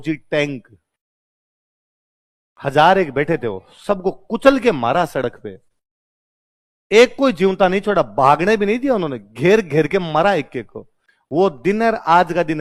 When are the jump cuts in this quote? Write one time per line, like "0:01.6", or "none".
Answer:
none